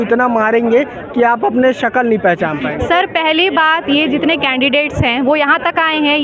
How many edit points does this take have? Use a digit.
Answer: 0